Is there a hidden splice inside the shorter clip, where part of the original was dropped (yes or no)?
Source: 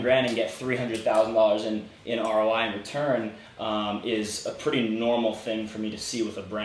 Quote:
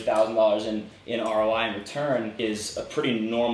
yes